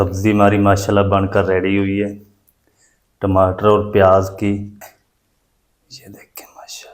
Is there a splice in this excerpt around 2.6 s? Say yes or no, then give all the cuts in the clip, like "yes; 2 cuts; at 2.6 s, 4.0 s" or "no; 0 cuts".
no; 1 cut; at 4.7 s